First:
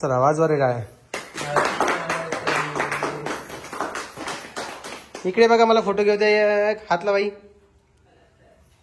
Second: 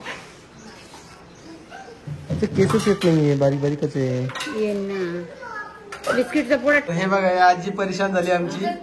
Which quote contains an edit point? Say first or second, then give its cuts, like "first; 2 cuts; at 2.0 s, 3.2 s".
second; 1 cut; at 6.9 s